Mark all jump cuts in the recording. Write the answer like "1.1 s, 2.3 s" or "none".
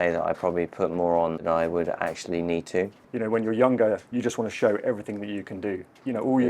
1.4 s, 3.0 s